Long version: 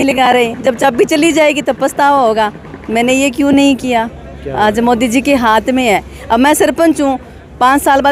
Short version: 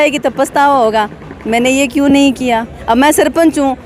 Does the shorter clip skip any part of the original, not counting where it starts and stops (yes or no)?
yes